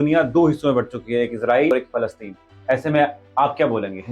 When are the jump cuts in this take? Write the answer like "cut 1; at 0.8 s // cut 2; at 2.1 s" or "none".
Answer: cut 1; at 1.7 s